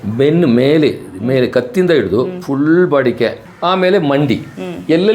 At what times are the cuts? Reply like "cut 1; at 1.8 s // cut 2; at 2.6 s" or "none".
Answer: cut 1; at 3.5 s